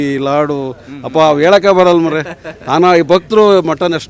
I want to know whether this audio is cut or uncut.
uncut